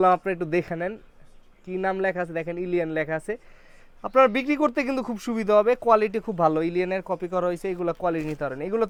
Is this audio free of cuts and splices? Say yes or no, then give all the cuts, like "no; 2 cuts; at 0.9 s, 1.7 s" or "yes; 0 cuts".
yes; 0 cuts